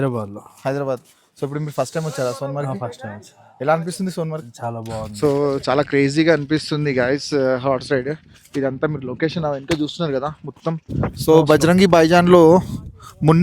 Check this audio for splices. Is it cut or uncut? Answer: cut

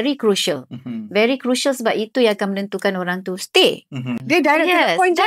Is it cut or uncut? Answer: cut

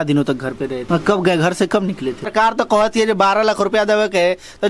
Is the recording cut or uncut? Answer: cut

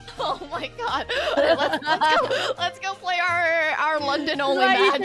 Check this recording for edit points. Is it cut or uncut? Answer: cut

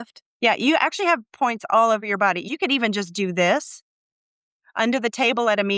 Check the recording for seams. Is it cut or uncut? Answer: cut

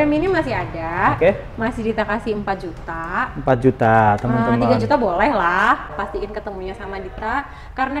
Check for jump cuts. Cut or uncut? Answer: cut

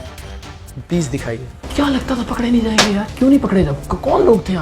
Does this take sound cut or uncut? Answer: cut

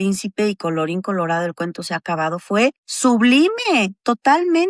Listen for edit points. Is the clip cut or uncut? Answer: uncut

